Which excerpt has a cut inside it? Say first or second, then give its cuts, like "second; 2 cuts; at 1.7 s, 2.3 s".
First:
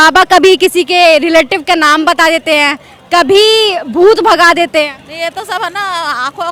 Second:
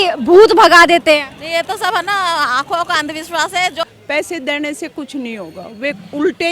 second; 1 cut; at 3.8 s